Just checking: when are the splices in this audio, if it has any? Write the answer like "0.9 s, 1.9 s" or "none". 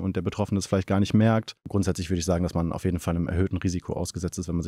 1.7 s